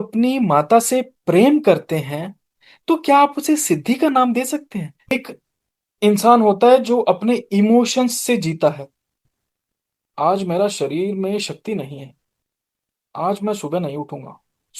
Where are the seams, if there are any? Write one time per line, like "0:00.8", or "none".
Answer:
0:05.1